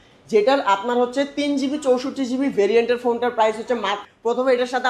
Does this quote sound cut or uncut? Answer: cut